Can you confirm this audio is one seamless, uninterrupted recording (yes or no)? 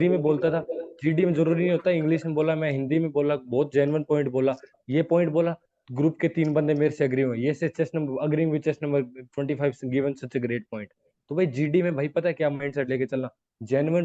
yes